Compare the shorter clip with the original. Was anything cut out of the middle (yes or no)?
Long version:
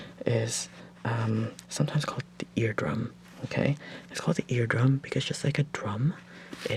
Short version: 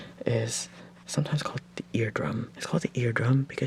yes